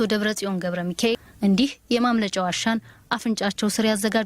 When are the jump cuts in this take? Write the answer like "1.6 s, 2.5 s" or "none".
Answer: 1.3 s

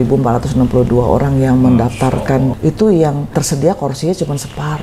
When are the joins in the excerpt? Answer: 2.5 s, 3.3 s

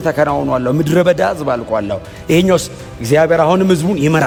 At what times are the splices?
none

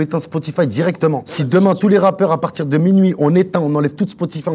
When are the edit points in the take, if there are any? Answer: 1.3 s

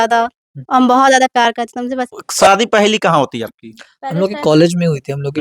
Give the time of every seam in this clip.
2.2 s

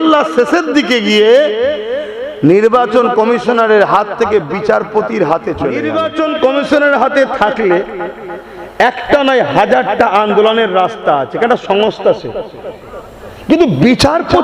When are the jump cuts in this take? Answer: 5.9 s

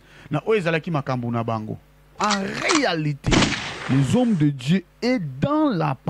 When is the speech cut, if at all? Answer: 2.2 s

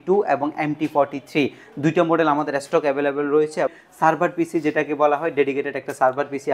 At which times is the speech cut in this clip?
3.8 s

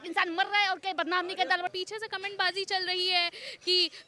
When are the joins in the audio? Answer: 1.7 s

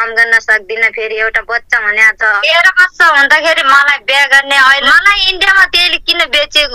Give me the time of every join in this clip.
2.4 s, 4.8 s

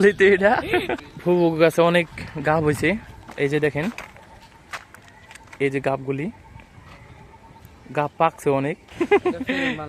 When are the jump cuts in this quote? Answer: 1.1 s, 8.8 s

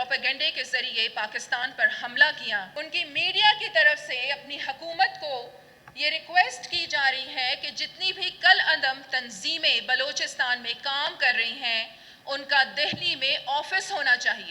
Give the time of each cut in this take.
2.7 s

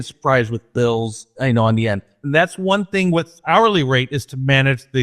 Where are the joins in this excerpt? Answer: 1.3 s, 2.1 s, 3.3 s

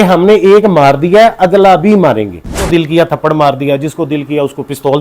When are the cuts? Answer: 2.6 s

